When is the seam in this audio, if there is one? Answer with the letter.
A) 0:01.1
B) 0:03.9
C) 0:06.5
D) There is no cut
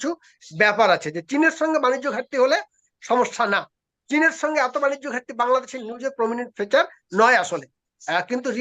D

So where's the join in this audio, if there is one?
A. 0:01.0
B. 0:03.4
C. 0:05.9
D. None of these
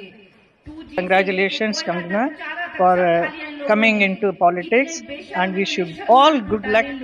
A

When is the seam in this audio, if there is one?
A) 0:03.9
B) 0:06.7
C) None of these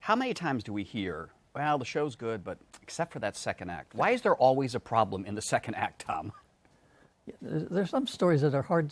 B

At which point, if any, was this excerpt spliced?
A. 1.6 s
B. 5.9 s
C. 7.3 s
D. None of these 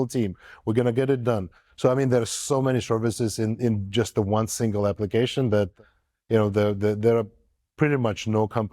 A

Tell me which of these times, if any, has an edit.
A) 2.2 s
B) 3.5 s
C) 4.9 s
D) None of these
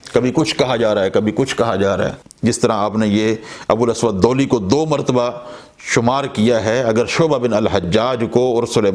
A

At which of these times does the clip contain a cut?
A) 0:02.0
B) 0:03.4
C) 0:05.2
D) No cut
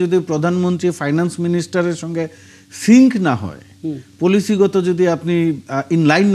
D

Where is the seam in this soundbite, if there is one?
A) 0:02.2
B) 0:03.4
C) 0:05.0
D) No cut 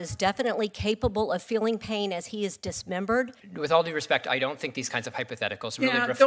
B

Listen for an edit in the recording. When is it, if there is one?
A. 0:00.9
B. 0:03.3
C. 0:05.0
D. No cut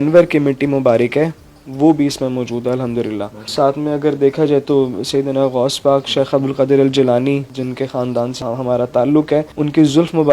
D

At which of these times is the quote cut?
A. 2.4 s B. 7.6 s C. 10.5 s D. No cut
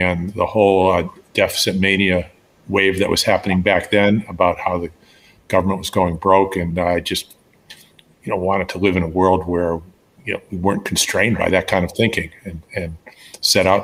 D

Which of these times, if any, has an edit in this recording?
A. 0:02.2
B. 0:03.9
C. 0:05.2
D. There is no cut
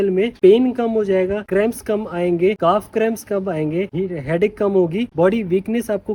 D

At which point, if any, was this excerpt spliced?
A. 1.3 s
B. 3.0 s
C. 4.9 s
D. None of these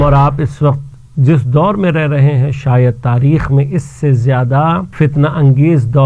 C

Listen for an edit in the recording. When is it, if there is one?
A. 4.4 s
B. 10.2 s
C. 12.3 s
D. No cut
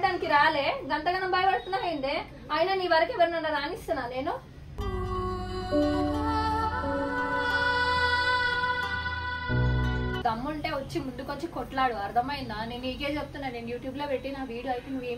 B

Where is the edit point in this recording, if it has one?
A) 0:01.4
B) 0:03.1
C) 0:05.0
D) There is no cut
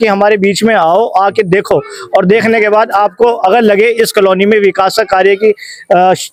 D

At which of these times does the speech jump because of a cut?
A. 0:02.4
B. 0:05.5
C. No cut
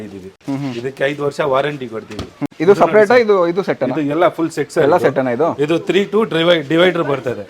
A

